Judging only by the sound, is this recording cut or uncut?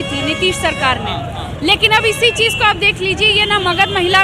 uncut